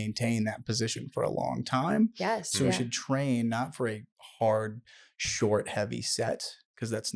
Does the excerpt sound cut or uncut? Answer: uncut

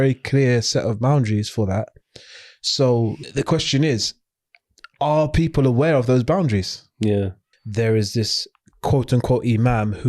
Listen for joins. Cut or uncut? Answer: cut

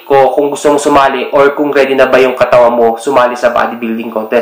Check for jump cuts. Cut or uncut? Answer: uncut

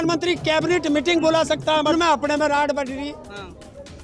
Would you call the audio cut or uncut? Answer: cut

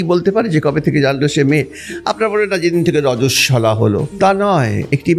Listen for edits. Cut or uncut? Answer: cut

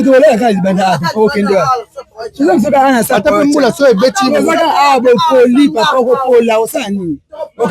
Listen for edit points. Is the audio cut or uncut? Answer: uncut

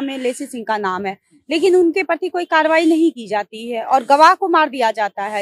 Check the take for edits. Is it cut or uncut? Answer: uncut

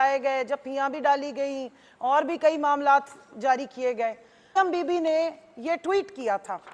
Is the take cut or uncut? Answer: uncut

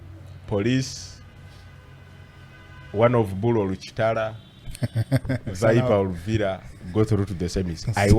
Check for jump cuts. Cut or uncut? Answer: uncut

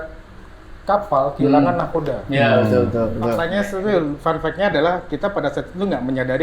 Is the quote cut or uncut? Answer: cut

